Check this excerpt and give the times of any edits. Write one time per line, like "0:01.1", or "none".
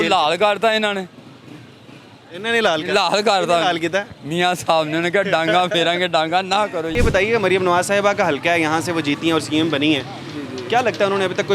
none

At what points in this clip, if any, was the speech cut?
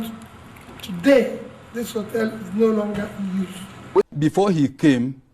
0:04.1

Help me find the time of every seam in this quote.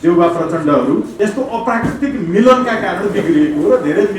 0:01.1

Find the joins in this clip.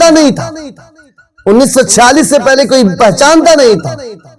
none

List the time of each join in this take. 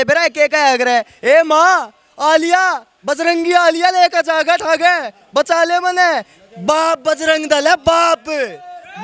none

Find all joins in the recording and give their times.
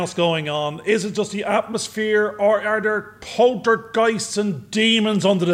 none

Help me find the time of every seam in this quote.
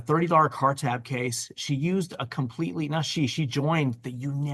none

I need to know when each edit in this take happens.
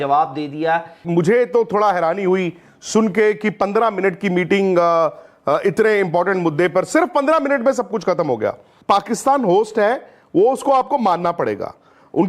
0:01.0
0:08.7

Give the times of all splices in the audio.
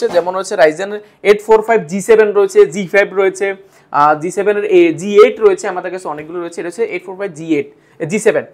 none

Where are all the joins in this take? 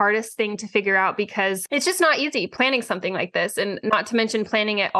0:01.6
0:02.5
0:03.8

